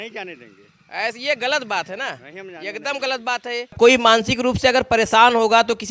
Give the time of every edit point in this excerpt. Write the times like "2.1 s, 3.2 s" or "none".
3.7 s